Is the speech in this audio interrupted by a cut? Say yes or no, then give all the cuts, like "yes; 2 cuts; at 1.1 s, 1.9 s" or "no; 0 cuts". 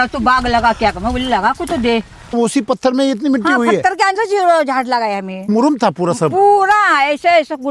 yes; 2 cuts; at 2.3 s, 5.5 s